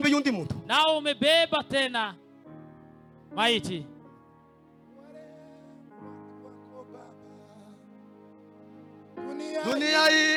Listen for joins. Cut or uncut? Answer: uncut